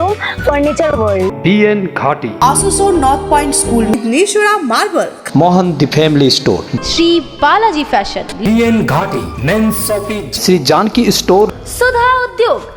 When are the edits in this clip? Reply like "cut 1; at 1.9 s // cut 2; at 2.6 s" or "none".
cut 1; at 6.7 s